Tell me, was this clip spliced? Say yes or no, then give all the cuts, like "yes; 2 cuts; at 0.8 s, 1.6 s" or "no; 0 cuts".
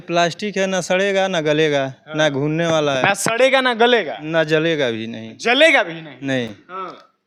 no; 0 cuts